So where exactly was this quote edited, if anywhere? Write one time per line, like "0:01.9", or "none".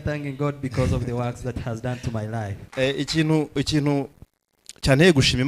0:02.6